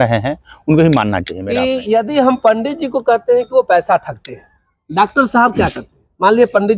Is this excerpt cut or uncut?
cut